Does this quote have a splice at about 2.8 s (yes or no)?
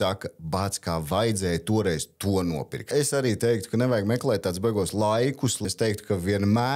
yes